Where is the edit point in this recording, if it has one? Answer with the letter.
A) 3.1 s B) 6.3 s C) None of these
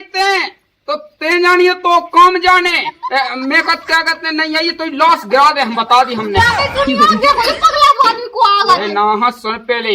C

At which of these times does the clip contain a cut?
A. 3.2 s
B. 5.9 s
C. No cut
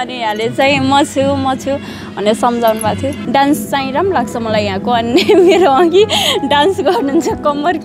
A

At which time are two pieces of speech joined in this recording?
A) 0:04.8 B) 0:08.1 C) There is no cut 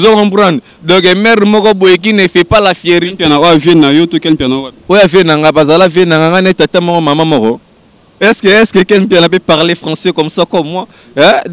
B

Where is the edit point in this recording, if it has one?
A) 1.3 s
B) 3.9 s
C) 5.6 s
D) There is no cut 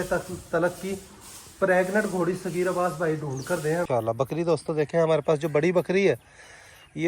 B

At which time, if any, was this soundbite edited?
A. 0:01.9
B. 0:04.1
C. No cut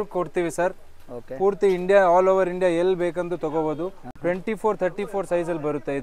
C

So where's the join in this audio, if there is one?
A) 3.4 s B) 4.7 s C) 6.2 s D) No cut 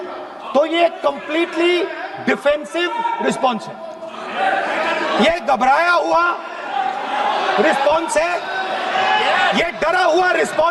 D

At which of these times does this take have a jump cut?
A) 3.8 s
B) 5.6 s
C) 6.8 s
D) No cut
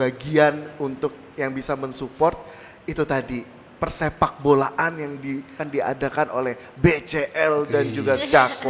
B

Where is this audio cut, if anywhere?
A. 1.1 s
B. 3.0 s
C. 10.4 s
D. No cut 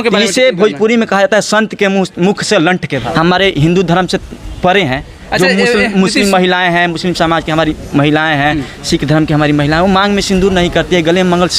B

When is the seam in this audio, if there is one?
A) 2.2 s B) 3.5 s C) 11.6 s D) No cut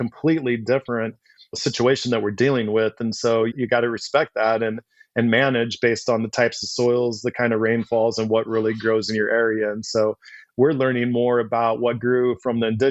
B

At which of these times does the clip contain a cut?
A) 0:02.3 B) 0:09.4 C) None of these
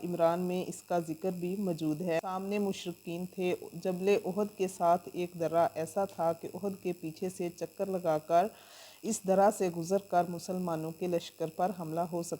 A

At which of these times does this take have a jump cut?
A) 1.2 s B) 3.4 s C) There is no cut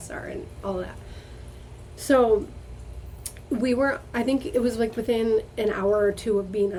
C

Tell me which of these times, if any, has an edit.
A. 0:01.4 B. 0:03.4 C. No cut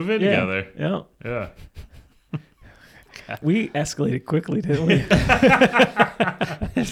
B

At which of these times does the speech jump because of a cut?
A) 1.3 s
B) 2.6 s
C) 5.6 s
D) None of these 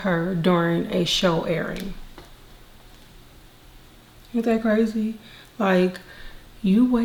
D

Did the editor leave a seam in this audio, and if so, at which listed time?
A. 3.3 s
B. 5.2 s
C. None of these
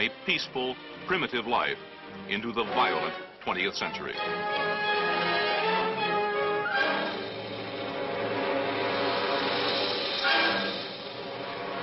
C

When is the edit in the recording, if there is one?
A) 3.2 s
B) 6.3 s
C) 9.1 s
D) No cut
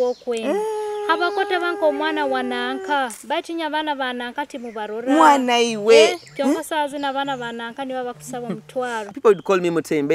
C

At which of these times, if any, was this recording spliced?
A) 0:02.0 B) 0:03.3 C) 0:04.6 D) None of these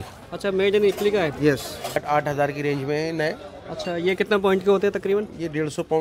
A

